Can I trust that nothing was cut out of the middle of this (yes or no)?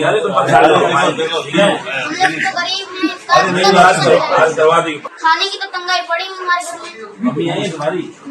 no